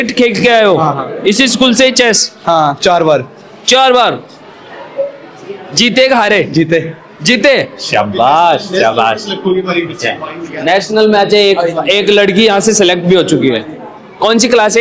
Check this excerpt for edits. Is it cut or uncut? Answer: uncut